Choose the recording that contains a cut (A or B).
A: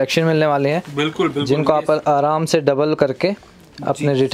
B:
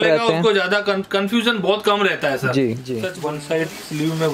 B